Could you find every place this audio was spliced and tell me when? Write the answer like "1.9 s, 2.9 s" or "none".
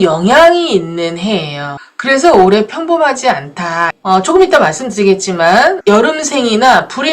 3.9 s, 5.8 s